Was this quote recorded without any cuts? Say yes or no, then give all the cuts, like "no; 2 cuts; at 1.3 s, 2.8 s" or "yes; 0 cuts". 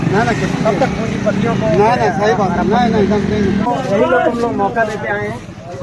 no; 1 cut; at 3.7 s